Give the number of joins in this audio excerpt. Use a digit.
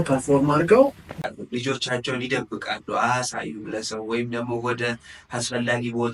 1